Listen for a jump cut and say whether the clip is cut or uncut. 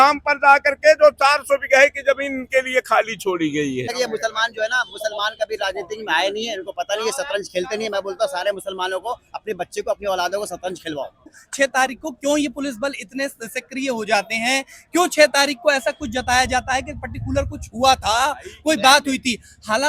cut